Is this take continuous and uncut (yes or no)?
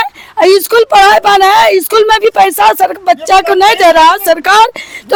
yes